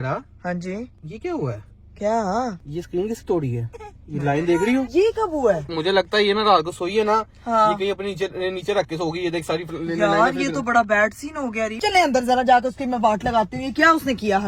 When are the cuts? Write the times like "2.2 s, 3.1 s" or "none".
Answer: 1.0 s, 2.6 s, 4.9 s, 5.7 s, 11.8 s